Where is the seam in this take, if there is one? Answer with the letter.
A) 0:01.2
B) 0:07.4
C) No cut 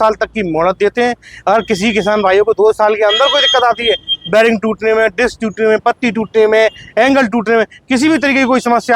C